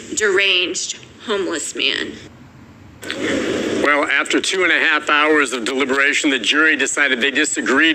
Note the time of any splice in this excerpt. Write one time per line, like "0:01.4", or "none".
0:04.8